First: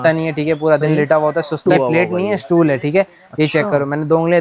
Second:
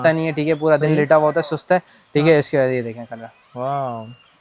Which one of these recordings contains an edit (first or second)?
first